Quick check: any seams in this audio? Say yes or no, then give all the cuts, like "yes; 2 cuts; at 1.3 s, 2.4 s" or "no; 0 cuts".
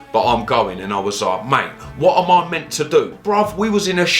yes; 1 cut; at 3.1 s